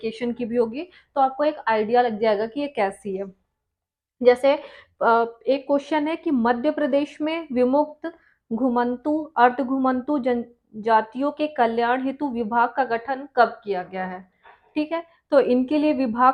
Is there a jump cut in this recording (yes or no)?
no